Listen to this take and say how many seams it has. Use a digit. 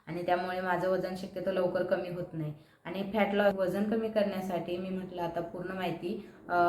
1